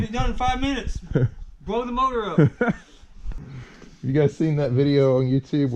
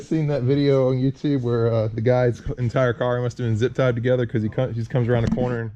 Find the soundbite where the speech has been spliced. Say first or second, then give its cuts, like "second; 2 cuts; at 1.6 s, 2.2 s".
first; 1 cut; at 3.3 s